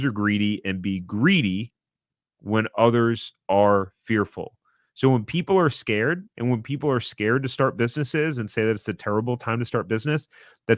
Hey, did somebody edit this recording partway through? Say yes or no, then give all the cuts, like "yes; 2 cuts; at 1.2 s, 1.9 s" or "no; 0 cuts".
no; 0 cuts